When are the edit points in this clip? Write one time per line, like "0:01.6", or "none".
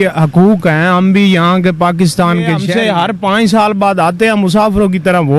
0:02.7